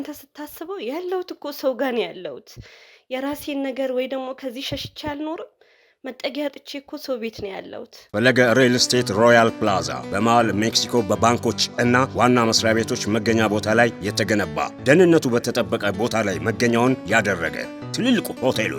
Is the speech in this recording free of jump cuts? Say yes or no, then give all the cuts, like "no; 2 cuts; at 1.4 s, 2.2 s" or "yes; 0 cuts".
no; 1 cut; at 8.0 s